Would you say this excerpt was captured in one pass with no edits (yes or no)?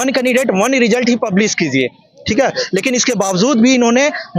yes